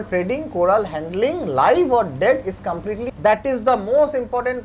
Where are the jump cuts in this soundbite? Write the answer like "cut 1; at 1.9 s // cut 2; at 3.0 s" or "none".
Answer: cut 1; at 3.1 s